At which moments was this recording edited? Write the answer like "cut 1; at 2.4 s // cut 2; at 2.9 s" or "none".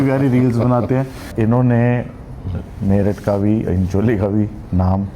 cut 1; at 1.3 s